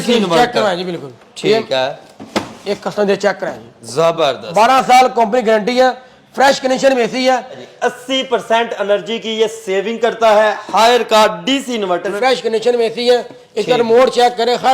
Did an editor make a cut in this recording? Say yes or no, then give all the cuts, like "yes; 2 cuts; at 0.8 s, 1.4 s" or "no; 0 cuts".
yes; 2 cuts; at 7.6 s, 12.1 s